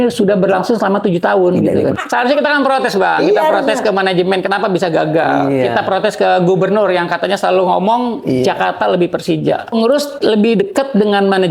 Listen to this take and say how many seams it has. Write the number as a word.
two